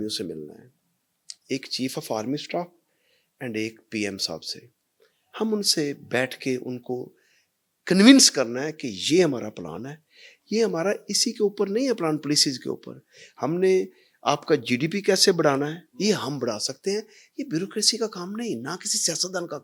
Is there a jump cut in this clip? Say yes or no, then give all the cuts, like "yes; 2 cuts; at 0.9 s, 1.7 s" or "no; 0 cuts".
no; 0 cuts